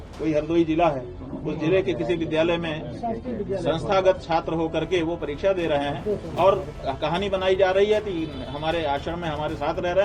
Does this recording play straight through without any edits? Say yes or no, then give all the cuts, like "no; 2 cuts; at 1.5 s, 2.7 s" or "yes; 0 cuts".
yes; 0 cuts